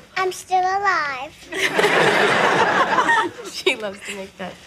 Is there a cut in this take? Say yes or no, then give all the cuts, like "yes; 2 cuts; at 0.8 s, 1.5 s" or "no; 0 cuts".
yes; 1 cut; at 1.1 s